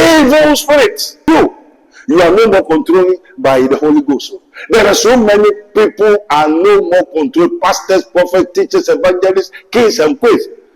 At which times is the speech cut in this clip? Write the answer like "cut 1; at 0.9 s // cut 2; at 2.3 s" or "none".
cut 1; at 1.3 s